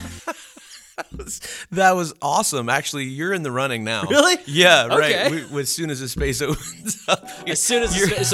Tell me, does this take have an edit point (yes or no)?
no